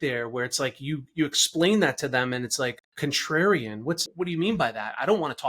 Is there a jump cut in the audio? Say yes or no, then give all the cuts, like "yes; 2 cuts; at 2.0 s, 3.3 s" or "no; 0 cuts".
yes; 2 cuts; at 2.8 s, 4.1 s